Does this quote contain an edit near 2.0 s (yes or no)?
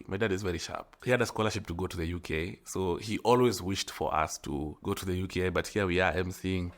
no